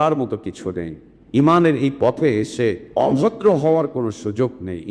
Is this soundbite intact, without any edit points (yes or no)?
no